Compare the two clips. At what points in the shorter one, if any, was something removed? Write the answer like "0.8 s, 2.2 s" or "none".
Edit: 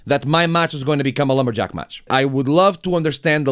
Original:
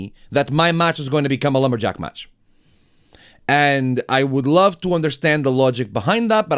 2.1 s